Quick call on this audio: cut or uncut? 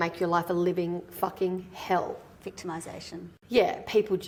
uncut